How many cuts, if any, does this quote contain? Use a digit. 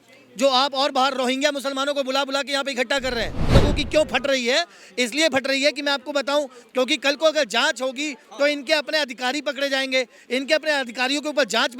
1